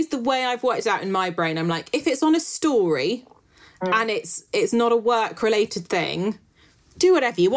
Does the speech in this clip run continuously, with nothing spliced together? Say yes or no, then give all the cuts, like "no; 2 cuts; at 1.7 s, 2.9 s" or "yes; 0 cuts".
yes; 0 cuts